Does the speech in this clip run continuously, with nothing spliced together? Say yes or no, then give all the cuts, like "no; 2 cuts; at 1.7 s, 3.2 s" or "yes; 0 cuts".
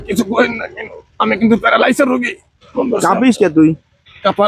yes; 0 cuts